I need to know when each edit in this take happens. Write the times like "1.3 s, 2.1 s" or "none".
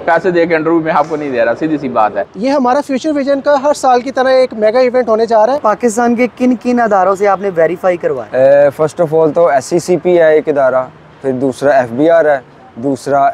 2.3 s, 5.6 s, 8.2 s

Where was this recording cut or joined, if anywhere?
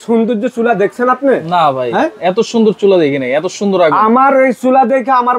none

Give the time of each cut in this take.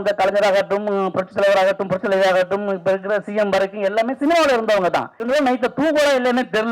5.2 s

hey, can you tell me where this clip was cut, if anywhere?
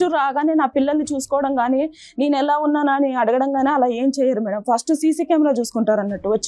none

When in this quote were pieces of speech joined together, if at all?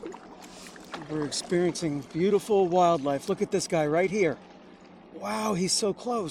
none

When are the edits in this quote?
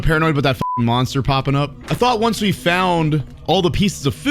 1.8 s, 3.3 s

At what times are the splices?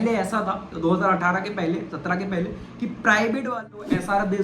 3.5 s

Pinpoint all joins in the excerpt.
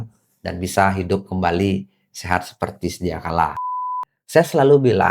3.6 s

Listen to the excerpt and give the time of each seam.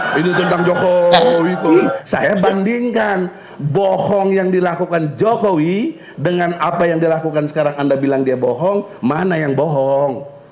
2.0 s

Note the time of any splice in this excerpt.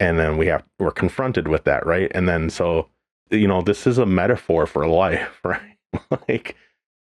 3.2 s

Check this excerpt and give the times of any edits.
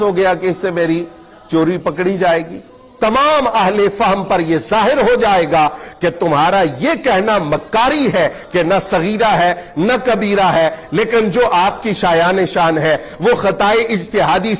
2.9 s

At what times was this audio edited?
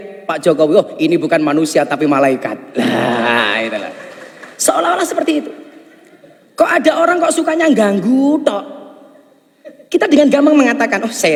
none

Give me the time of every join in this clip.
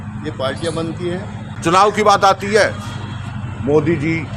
1.4 s

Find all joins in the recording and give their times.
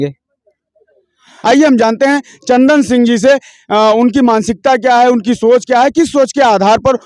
1.4 s

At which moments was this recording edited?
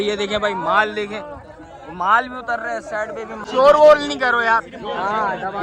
3.4 s

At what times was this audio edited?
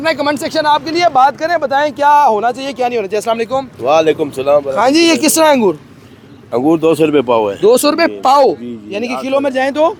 none

